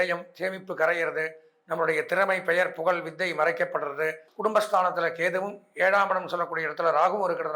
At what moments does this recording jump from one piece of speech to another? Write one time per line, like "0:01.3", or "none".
0:04.2